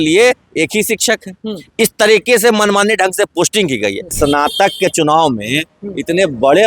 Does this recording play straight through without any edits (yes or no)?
no